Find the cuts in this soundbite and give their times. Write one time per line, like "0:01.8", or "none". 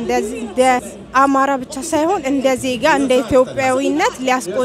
0:01.0